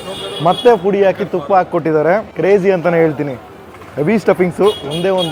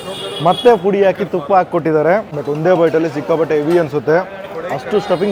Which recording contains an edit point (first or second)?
second